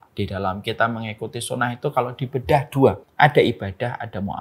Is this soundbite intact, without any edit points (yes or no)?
no